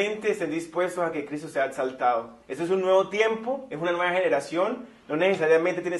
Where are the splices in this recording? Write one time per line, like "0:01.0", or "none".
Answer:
0:03.0